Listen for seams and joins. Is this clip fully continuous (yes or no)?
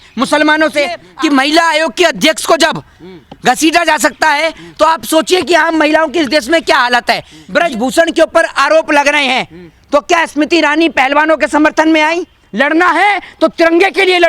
no